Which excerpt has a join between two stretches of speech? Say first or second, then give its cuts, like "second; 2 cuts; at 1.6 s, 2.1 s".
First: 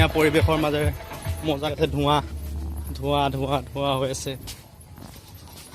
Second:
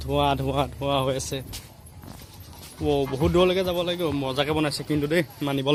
first; 1 cut; at 1.7 s